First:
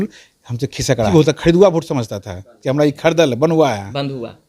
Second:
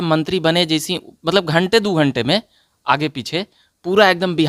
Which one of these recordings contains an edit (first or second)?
first